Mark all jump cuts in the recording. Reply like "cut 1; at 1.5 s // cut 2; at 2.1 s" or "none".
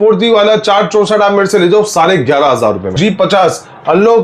cut 1; at 3.0 s